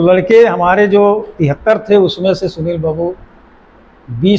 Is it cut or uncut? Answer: uncut